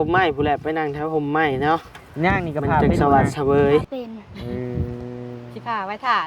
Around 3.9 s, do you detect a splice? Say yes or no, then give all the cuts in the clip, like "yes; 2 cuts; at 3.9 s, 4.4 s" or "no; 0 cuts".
yes; 1 cut; at 3.9 s